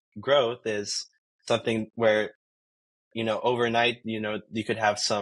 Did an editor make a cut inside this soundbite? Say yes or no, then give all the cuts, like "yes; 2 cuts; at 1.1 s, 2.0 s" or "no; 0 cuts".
no; 0 cuts